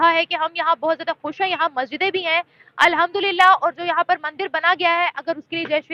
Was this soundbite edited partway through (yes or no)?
no